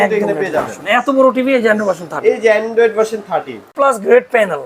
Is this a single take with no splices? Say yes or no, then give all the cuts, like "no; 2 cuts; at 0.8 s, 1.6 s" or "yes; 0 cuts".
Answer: no; 1 cut; at 3.7 s